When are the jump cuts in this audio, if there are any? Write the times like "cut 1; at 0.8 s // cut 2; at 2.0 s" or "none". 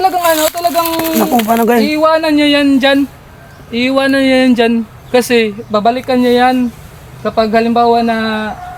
none